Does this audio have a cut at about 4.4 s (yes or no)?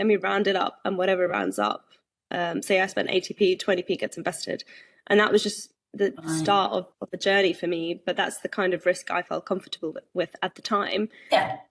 no